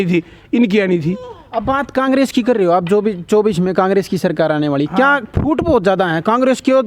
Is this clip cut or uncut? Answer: uncut